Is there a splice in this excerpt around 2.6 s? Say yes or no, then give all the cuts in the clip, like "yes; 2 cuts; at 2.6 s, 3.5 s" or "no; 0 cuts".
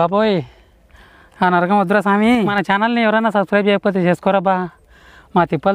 yes; 1 cut; at 2.6 s